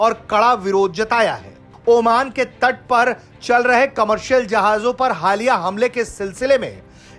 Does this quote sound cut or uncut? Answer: uncut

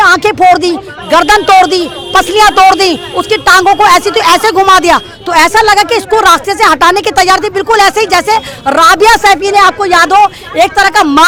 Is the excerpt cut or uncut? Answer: uncut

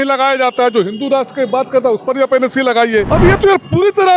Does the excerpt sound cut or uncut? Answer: cut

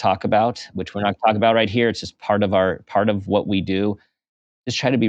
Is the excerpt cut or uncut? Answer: uncut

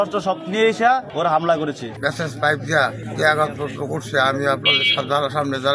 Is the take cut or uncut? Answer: cut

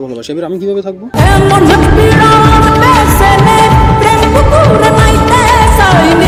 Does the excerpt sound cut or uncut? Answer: uncut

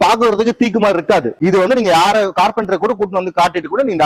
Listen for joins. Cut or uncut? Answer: cut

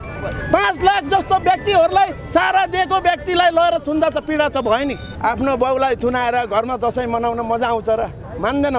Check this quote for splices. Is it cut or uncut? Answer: cut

